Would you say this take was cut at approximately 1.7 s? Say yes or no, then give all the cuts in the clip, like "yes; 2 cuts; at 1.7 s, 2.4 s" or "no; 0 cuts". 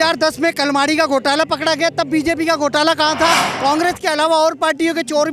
no; 1 cut; at 3.5 s